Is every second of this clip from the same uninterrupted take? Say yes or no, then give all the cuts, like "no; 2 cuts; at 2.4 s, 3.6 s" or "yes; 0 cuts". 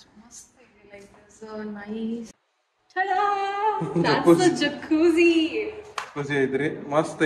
no; 1 cut; at 2.4 s